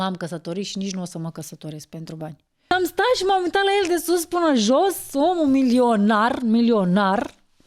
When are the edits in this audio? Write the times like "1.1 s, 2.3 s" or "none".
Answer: 2.7 s